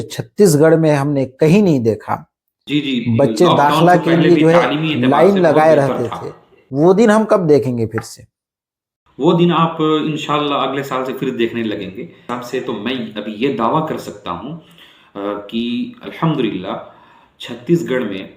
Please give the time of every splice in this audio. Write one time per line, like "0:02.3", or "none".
0:12.2